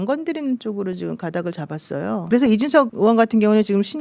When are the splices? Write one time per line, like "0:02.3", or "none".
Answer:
0:02.2
0:02.9